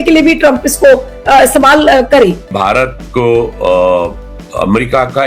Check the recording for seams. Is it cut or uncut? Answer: cut